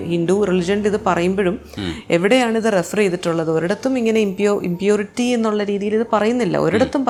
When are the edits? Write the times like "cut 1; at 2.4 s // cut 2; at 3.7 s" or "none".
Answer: none

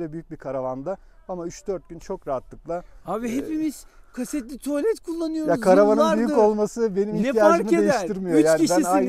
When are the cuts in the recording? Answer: none

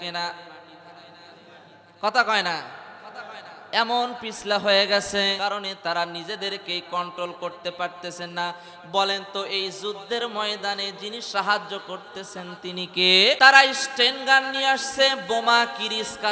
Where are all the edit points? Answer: cut 1; at 5.4 s // cut 2; at 13.4 s

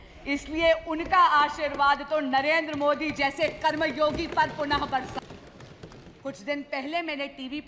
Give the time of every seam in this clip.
cut 1; at 5.2 s

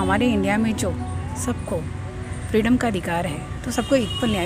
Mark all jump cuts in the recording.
none

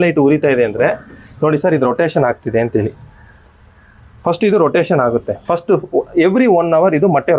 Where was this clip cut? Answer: none

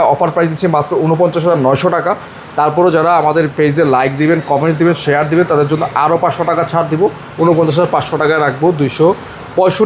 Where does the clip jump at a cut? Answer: none

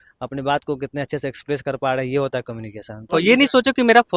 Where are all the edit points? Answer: cut 1; at 3.1 s

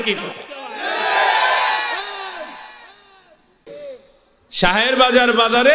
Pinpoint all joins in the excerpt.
cut 1; at 3.6 s

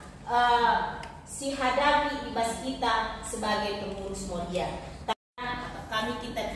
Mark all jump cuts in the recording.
cut 1; at 5.4 s

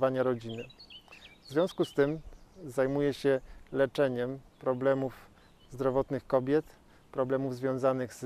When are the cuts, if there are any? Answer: cut 1; at 2.2 s

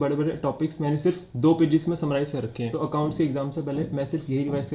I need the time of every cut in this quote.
cut 1; at 2.7 s

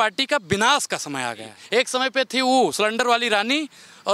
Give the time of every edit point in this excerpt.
cut 1; at 1.6 s

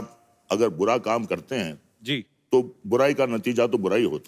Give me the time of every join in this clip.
none

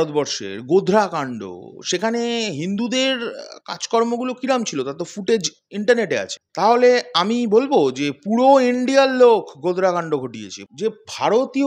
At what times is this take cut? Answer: cut 1; at 10.6 s

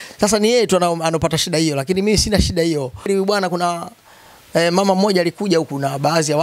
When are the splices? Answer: cut 1; at 3.1 s

